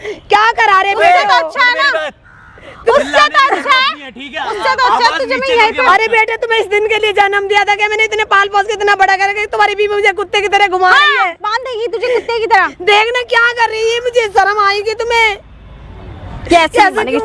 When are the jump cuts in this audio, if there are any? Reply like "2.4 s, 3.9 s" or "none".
none